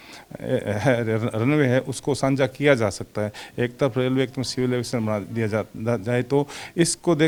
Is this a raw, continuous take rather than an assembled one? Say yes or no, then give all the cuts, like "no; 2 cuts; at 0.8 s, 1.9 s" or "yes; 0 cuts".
yes; 0 cuts